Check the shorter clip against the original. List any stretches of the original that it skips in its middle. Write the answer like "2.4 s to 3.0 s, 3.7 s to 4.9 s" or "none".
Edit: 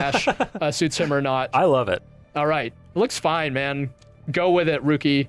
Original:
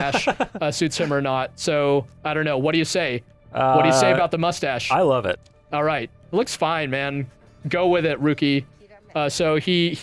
1.5 s to 4.8 s